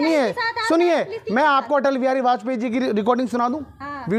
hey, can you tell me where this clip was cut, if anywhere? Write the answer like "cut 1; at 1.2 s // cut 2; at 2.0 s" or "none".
none